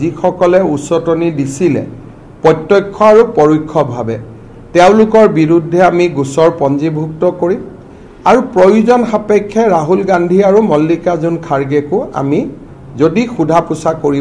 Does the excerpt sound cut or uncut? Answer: uncut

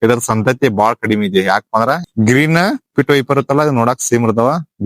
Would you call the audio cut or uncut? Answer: cut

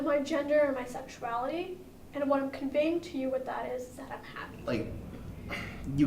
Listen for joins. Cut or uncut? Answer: cut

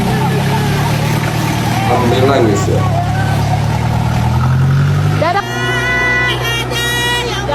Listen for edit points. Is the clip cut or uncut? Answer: uncut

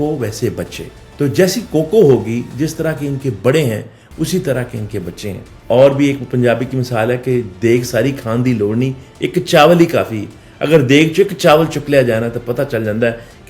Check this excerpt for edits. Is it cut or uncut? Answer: uncut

